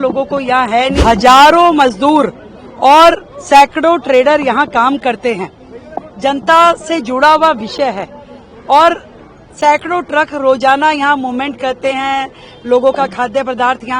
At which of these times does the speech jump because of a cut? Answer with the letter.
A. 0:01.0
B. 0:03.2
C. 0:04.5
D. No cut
A